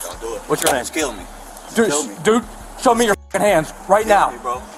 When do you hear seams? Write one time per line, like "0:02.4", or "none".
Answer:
0:03.0